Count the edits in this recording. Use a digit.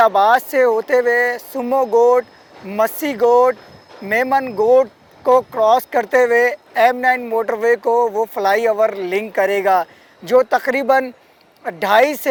0